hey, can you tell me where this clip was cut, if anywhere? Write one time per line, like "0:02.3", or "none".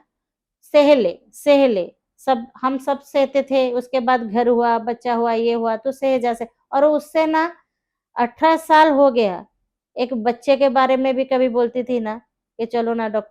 none